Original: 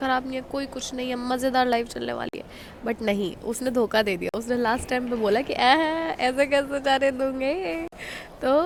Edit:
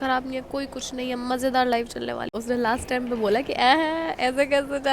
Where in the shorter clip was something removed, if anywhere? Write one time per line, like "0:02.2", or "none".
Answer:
0:02.4

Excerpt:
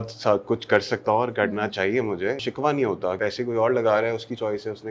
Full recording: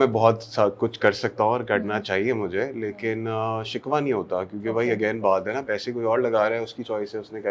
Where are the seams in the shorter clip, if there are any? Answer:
0:02.4
0:03.2

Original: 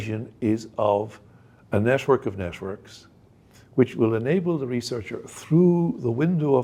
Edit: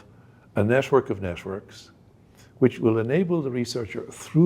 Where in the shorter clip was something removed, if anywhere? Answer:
none

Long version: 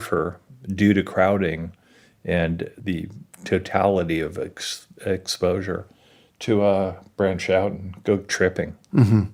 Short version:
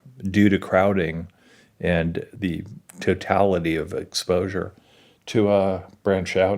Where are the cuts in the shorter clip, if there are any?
0:04.1

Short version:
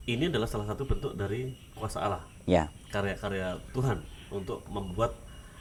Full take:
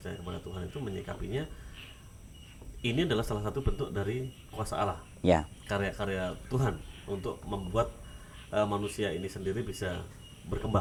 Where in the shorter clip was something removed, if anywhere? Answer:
none

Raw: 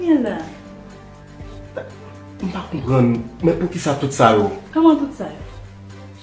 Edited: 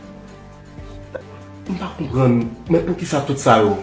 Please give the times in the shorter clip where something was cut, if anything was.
0:01.2

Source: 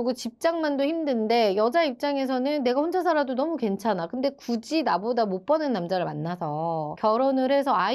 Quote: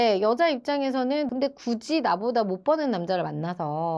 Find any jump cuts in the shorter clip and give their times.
0:01.3

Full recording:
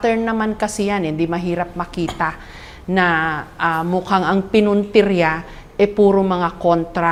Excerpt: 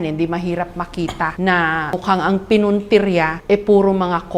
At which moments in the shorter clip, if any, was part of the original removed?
0:01.3
0:01.9
0:03.3

